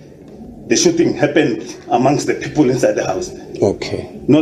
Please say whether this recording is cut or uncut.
uncut